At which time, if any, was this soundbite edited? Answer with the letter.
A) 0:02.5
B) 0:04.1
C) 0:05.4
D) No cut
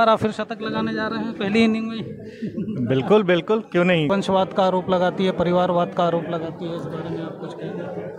B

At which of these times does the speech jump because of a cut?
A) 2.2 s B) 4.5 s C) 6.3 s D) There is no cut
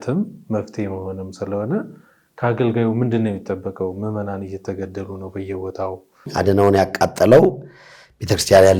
C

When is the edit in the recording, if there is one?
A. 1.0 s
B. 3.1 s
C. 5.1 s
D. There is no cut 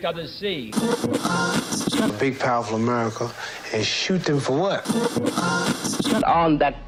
D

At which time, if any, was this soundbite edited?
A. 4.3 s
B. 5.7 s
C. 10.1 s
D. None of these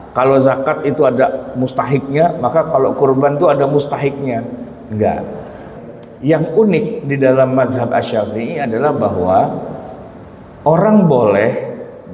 B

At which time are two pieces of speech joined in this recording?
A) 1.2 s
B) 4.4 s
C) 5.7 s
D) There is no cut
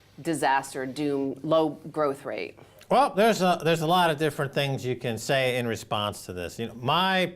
A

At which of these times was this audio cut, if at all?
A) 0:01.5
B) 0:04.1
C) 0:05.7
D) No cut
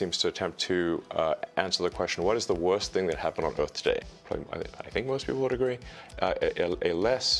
B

